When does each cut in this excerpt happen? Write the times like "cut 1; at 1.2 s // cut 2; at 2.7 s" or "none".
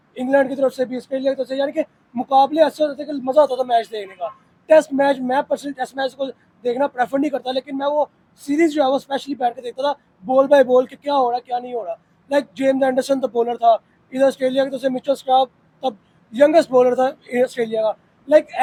none